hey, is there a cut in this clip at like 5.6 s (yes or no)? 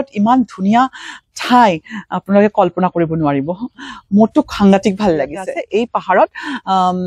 yes